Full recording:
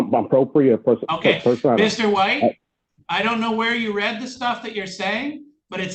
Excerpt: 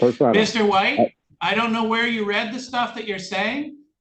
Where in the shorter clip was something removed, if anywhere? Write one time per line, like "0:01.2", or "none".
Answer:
0:01.3